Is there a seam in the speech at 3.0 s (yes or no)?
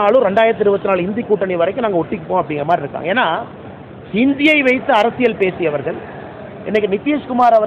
no